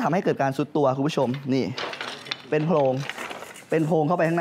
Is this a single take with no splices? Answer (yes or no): yes